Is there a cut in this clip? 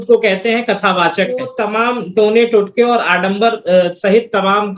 yes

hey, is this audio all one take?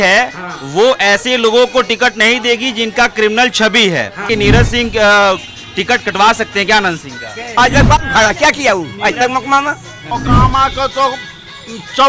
no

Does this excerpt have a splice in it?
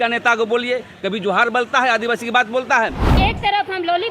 yes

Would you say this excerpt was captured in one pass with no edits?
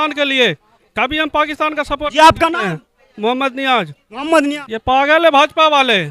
no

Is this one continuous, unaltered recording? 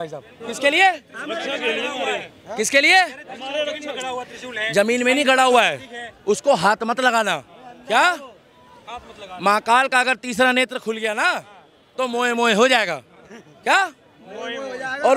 yes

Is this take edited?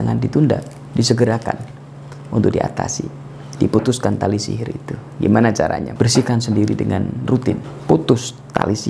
yes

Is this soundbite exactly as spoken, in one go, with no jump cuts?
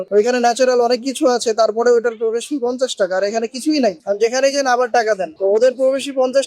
no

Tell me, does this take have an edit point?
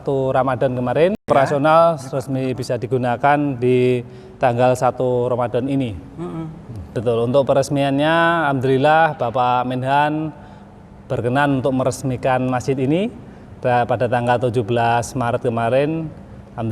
yes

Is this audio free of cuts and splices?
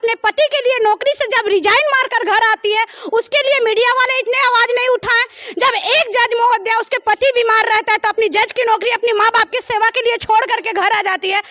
yes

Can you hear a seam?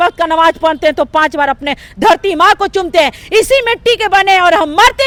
no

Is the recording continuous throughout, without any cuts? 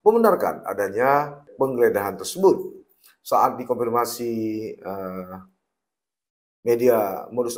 no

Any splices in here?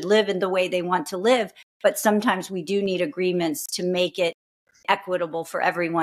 no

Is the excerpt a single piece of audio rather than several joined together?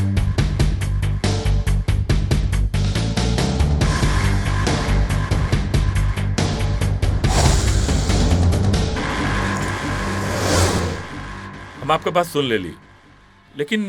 yes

